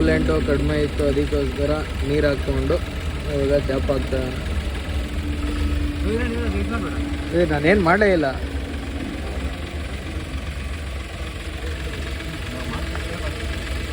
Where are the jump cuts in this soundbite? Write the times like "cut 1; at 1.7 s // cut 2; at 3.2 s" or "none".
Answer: none

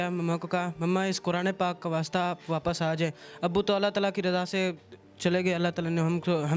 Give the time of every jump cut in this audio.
none

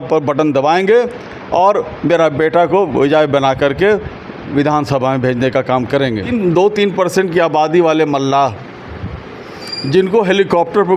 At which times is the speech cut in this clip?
cut 1; at 6.3 s

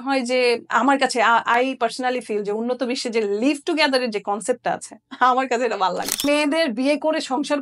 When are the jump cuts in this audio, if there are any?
cut 1; at 6.2 s

